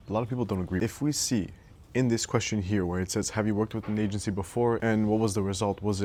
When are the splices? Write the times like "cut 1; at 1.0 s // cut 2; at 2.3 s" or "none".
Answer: none